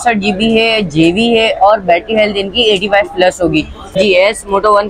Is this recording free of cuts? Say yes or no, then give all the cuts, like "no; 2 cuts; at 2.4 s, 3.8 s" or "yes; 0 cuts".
no; 1 cut; at 3.9 s